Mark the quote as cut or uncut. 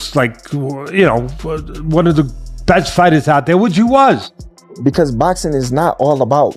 cut